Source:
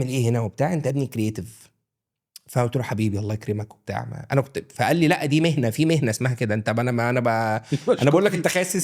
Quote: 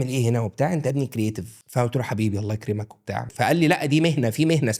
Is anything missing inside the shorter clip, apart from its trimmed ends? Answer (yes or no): yes